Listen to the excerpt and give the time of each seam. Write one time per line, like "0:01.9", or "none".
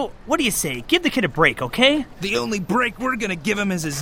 0:02.2